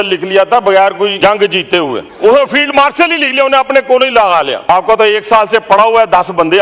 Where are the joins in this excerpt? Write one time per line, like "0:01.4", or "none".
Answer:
0:01.1
0:02.1
0:04.7